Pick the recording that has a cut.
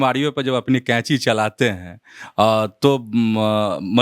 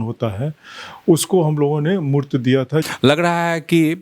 second; 1 cut; at 2.9 s

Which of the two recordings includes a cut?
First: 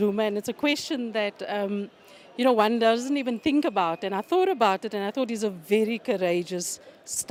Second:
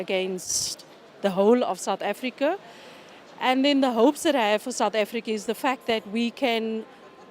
second; 1 cut; at 6.4 s

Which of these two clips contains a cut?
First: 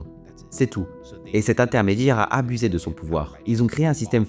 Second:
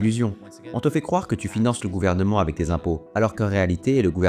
first; 1 cut; at 3.3 s

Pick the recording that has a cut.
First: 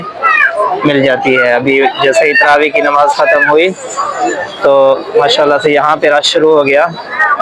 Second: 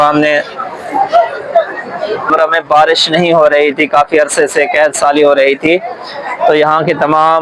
second; 1 cut; at 2.3 s

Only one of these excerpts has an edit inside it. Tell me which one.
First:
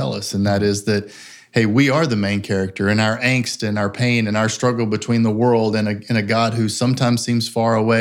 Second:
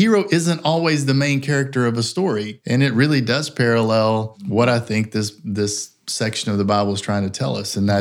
second; 2 cuts; at 2.5 s, 4.4 s

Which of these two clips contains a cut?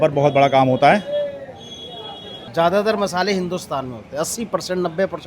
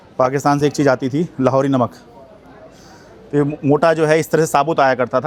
first; 1 cut; at 2.3 s

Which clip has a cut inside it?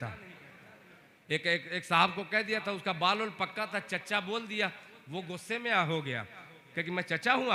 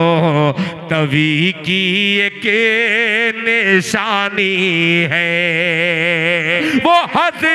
second; 1 cut; at 6.6 s

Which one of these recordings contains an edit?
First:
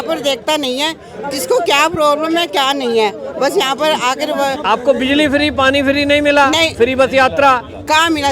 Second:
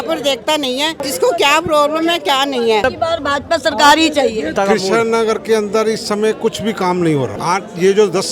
second; 4 cuts; at 1.0 s, 2.8 s, 4.5 s, 7.4 s

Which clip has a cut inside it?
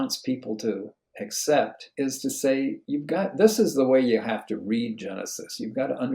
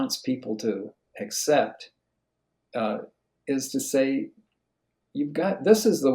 first; 2 cuts; at 1.8 s, 2.8 s

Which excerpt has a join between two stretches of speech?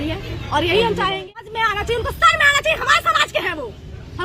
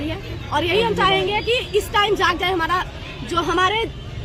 first; 1 cut; at 1.5 s

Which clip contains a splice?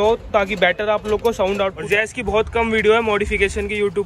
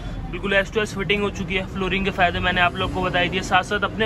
first; 1 cut; at 1.8 s

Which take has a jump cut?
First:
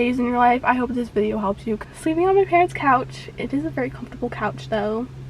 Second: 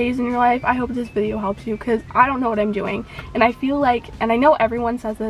first; 1 cut; at 1.8 s

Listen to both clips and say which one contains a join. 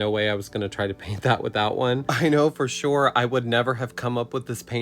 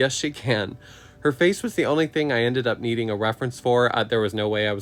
first; 1 cut; at 2.1 s

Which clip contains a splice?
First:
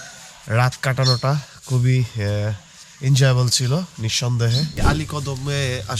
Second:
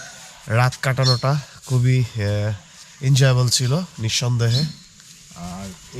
first; 1 cut; at 4.8 s

